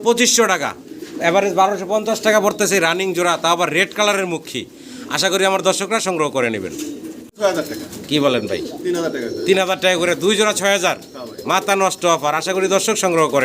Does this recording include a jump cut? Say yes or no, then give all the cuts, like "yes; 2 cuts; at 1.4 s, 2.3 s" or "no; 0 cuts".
yes; 1 cut; at 7.3 s